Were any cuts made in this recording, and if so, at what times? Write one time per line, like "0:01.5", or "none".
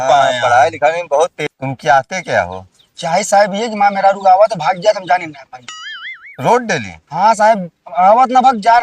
0:01.4